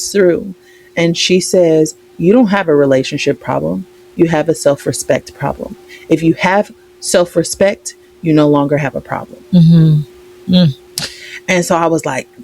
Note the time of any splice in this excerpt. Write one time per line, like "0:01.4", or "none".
none